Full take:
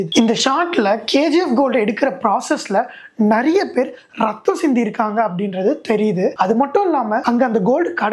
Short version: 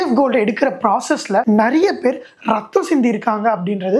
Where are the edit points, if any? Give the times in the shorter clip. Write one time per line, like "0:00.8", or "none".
0:01.4